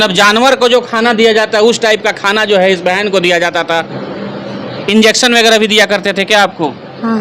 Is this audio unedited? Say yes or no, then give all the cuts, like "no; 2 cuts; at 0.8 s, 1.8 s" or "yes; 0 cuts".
no; 1 cut; at 4.0 s